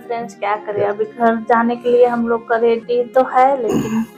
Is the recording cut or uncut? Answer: uncut